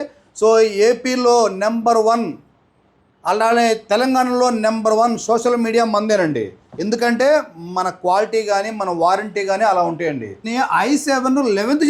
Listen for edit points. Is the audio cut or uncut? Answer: cut